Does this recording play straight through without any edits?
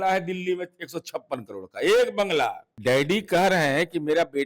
no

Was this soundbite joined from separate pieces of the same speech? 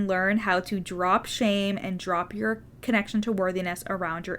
yes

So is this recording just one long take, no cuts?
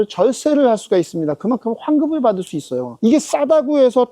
no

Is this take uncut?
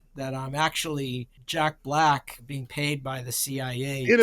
no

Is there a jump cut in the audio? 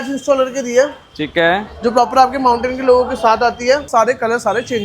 yes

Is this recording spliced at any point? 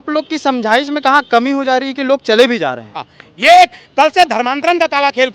yes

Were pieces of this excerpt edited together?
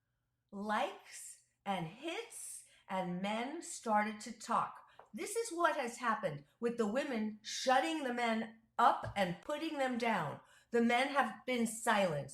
yes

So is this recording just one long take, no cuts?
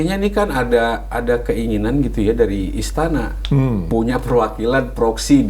yes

